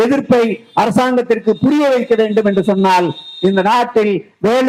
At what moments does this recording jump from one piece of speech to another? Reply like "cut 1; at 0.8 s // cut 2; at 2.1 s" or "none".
none